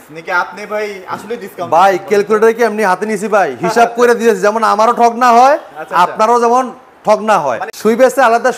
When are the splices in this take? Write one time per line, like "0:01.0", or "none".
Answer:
0:07.6